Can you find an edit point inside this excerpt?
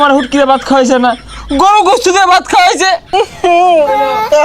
yes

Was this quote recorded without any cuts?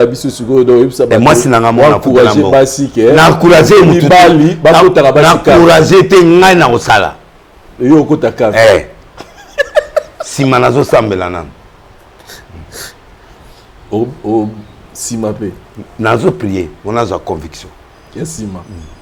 yes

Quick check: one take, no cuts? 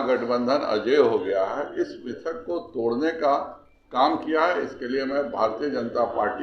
yes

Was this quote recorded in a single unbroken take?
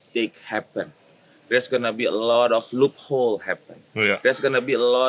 yes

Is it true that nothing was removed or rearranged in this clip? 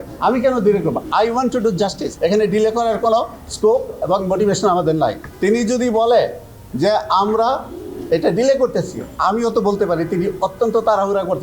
no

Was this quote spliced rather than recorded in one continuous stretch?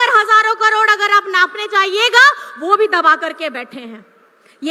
no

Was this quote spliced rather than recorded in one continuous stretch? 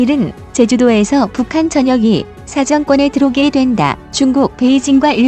yes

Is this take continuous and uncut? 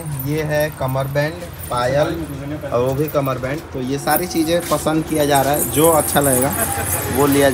yes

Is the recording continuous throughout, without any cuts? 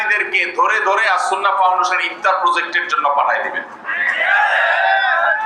yes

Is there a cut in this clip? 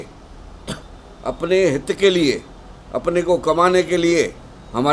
no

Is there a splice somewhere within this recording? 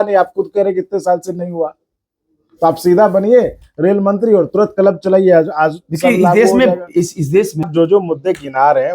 yes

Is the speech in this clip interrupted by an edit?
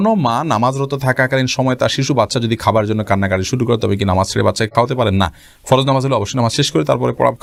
no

